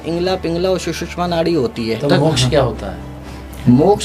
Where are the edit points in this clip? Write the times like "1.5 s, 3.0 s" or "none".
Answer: 2.0 s